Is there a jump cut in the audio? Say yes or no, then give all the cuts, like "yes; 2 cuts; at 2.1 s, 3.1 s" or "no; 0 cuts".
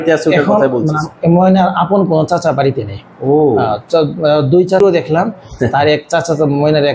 yes; 1 cut; at 4.8 s